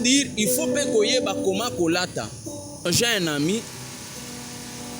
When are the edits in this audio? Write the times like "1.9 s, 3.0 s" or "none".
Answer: 2.9 s

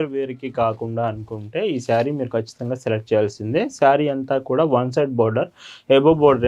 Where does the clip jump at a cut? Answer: none

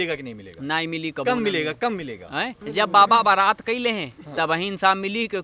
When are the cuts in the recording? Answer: 2.6 s

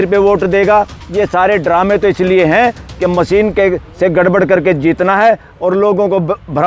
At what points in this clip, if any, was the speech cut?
none

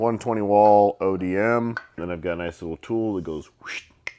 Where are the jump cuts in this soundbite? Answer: 2.0 s

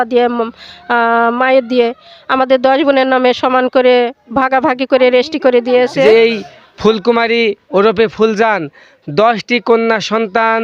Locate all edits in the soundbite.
5.8 s

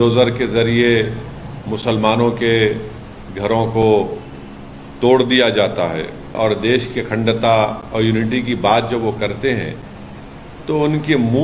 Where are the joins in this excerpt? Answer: 6.3 s

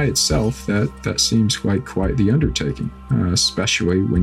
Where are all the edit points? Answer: 3.1 s

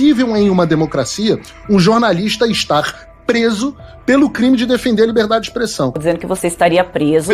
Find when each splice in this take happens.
6.0 s

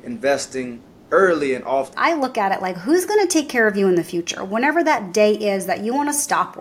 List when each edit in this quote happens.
1.9 s

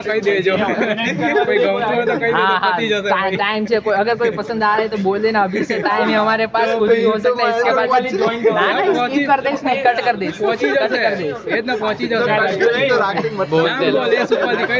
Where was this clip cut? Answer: none

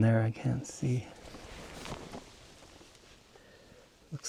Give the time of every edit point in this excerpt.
none

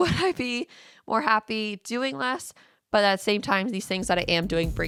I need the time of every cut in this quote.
none

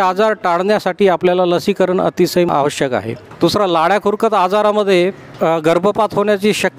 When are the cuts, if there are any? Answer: 3.2 s, 5.2 s

